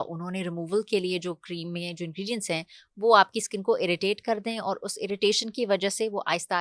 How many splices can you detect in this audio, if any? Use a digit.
0